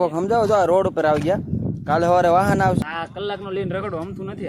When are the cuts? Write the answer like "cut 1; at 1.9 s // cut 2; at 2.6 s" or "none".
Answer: cut 1; at 2.8 s